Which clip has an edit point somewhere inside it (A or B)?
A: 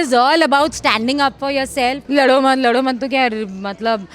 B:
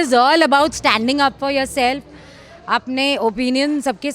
A